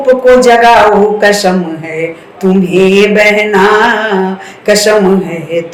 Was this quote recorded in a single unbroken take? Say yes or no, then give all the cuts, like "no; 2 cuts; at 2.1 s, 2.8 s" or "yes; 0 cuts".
yes; 0 cuts